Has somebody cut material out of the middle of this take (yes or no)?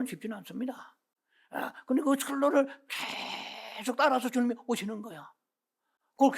no